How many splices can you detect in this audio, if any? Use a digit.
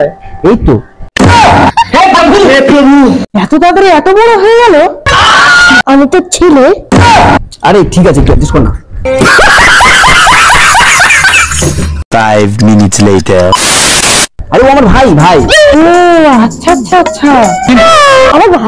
0